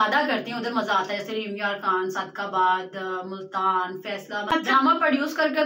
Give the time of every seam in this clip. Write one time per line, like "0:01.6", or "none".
0:04.5